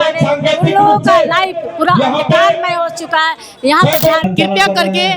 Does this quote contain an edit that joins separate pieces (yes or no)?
yes